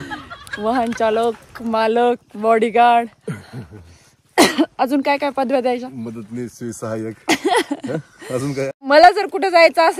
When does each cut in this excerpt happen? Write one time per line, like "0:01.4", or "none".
0:08.8